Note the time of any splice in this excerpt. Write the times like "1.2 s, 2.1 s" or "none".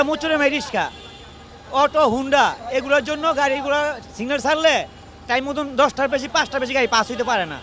none